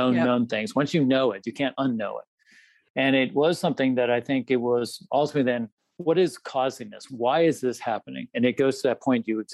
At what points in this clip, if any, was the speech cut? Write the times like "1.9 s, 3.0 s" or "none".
5.7 s, 7.0 s